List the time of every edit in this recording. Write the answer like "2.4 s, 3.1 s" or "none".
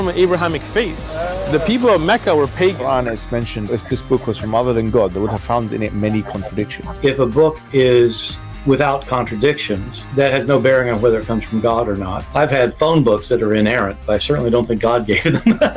3.0 s